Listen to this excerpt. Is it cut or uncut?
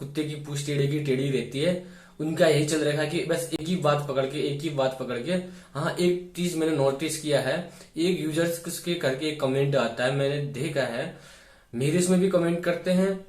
uncut